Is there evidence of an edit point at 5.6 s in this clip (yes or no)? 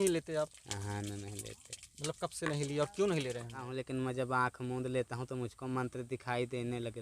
no